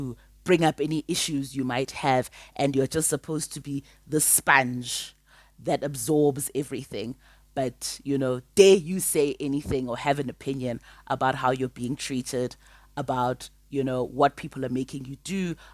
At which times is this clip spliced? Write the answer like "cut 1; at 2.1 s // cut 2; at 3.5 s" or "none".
none